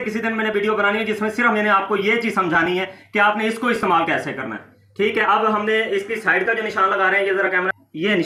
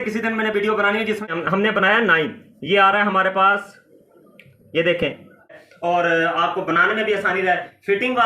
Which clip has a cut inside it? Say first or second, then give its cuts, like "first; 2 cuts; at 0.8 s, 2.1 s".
second; 2 cuts; at 1.3 s, 5.5 s